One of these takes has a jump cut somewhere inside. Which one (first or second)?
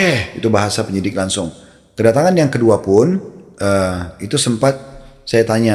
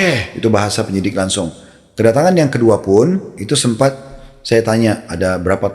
second